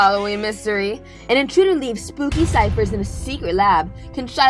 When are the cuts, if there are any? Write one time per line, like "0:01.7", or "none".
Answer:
none